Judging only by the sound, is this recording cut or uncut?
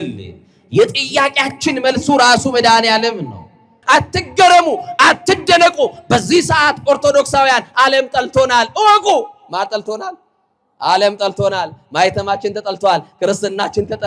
cut